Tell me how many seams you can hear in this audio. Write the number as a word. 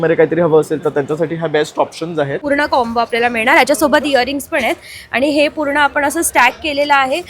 one